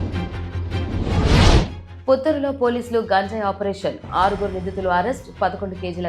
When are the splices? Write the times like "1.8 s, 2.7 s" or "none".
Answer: 1.8 s